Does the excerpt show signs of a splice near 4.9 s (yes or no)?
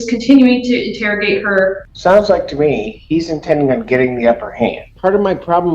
yes